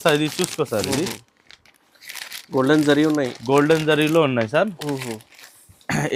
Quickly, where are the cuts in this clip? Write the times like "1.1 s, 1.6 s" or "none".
none